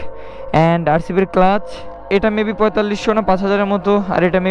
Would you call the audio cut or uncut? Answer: cut